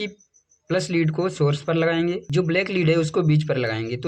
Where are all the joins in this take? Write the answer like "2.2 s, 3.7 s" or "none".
2.2 s